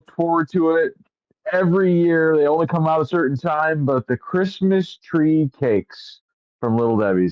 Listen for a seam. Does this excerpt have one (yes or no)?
no